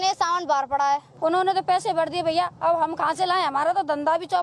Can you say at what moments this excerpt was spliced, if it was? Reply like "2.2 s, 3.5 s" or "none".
1.1 s